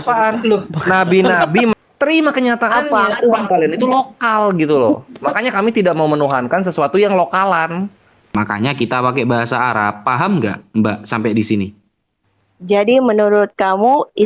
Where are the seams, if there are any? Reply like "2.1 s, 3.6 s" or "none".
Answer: 1.7 s, 8.3 s